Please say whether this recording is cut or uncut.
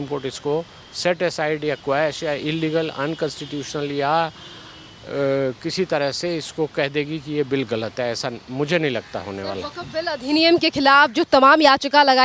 uncut